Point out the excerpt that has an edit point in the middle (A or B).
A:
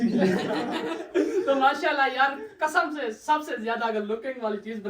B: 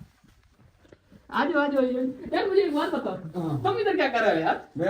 A